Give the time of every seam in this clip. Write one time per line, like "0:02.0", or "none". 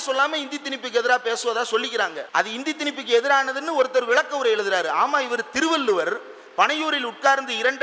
0:02.2